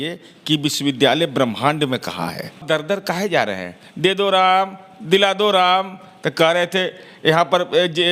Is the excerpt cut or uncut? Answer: cut